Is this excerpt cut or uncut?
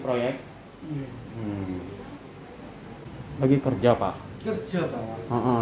cut